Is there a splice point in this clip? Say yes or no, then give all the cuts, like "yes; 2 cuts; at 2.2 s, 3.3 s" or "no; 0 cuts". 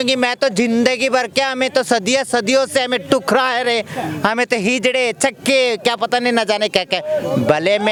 no; 0 cuts